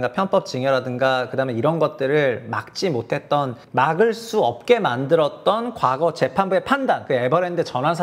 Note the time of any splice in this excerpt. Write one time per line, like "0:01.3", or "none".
0:03.6
0:07.0

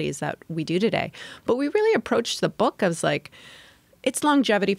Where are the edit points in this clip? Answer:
none

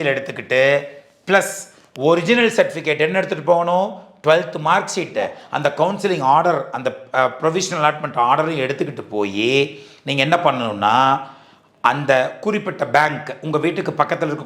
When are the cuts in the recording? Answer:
0:05.4

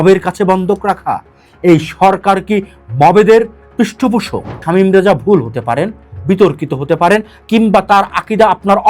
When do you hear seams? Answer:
0:04.6

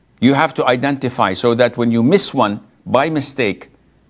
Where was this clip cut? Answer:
none

